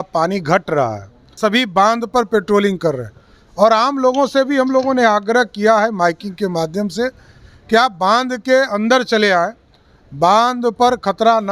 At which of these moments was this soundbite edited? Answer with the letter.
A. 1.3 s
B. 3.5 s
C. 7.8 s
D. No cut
A